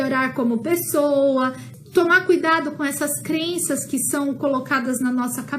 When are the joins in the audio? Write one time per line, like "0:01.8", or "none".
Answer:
0:01.7

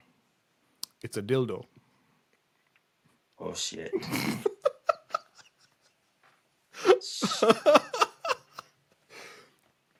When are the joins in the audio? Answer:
none

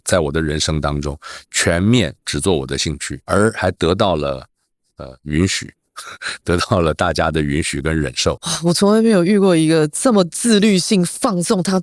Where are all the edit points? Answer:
none

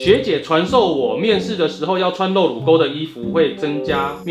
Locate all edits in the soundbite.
none

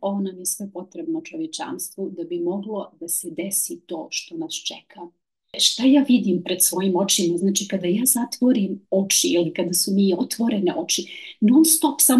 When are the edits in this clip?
0:05.6

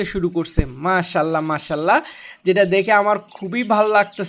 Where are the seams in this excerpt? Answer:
none

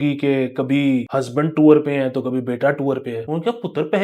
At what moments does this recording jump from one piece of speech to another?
0:01.1
0:03.2

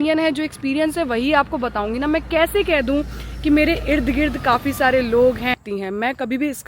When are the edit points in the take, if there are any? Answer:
0:05.6

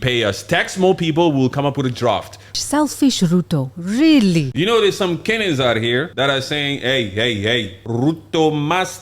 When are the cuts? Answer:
0:02.5
0:04.8
0:06.1
0:07.8

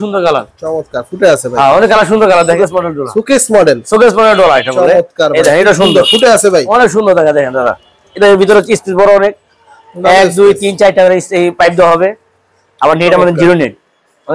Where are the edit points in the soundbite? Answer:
0:02.6

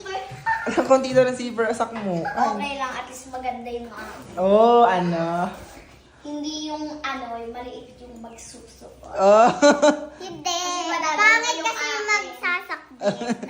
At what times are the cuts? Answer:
none

